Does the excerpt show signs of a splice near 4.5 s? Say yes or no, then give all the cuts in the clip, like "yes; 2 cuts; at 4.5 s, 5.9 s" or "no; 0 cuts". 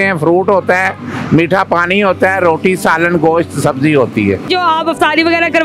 yes; 1 cut; at 4.5 s